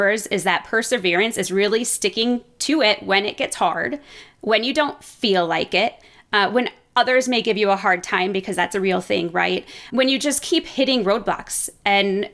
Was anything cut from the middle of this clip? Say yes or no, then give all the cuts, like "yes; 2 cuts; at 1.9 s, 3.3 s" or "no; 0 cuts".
no; 0 cuts